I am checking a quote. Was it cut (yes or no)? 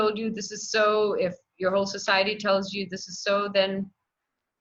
no